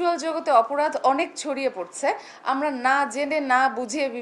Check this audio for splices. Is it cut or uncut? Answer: uncut